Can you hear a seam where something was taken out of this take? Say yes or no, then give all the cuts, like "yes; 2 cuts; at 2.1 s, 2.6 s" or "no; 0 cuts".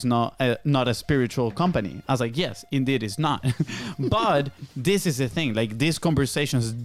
no; 0 cuts